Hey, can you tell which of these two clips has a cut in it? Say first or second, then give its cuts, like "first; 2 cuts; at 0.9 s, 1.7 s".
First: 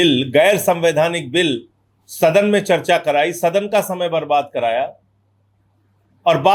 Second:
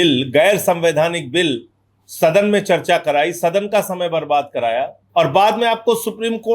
second; 1 cut; at 5.0 s